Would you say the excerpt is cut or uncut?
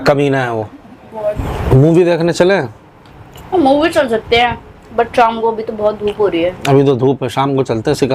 cut